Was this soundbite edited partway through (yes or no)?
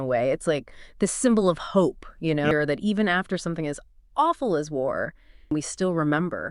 yes